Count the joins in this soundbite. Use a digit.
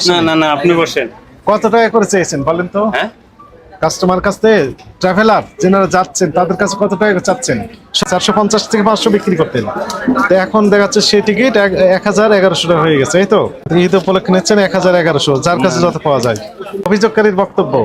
3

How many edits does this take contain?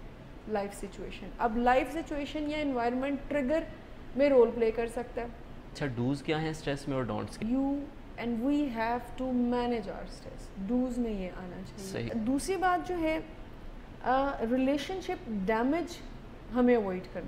3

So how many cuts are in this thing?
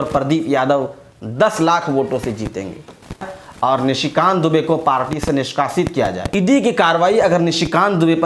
2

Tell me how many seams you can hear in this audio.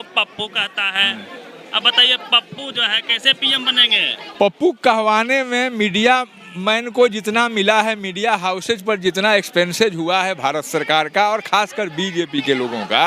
1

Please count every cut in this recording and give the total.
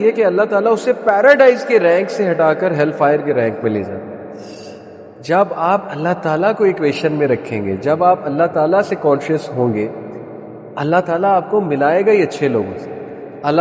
1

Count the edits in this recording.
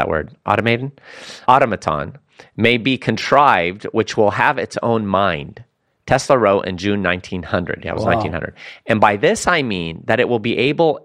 1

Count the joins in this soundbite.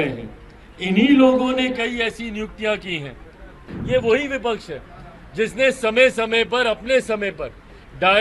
1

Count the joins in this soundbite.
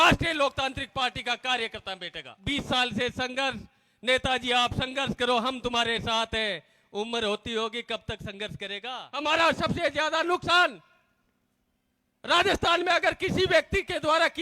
2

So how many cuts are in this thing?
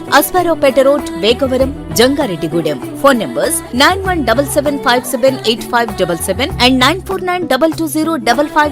0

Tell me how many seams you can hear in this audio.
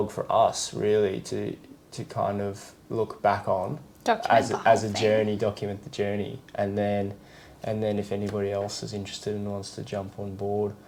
0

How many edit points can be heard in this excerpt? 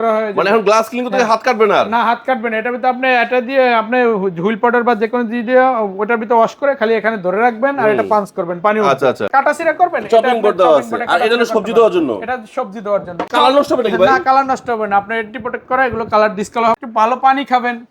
3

